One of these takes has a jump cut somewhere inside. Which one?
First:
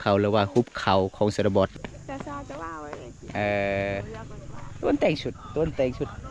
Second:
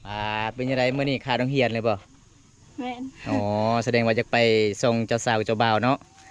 first; 1 cut; at 1.7 s

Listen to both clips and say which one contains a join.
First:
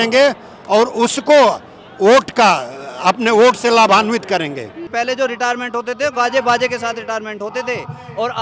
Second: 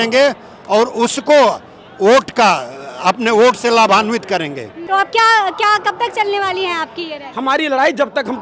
first; 1 cut; at 4.8 s

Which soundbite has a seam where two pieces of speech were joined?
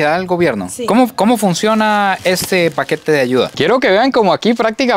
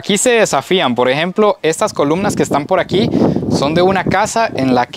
first; 1 cut; at 3.5 s

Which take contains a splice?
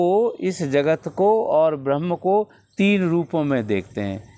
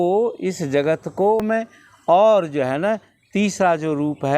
second; 1 cut; at 1.4 s

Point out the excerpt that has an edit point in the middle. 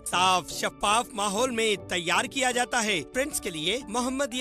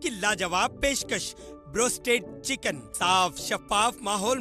first; 1 cut; at 3.1 s

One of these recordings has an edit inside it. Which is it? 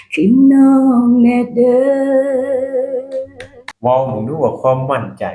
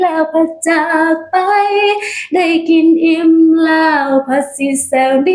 first; 1 cut; at 3.6 s

